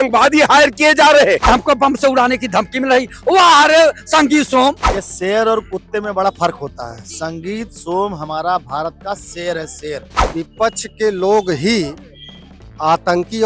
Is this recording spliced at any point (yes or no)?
yes